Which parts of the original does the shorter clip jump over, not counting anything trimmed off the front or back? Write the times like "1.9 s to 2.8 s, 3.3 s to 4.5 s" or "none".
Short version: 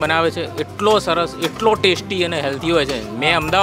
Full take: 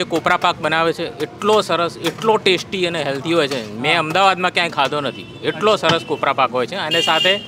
none